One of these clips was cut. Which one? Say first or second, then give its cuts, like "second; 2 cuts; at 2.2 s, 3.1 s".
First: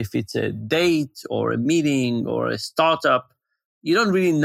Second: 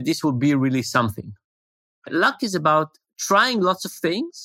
second; 1 cut; at 2.1 s